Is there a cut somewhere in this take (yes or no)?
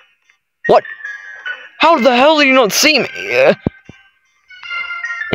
no